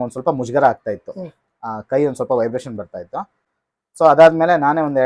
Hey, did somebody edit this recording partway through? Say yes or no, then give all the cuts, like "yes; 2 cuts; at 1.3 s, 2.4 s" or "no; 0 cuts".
no; 0 cuts